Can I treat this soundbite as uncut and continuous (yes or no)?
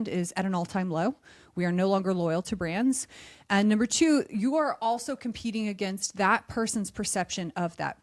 yes